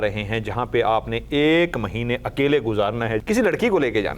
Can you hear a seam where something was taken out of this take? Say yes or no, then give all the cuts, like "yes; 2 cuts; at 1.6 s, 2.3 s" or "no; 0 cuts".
yes; 1 cut; at 3.2 s